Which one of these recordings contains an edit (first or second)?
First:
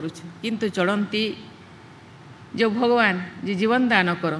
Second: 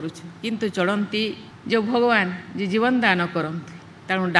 second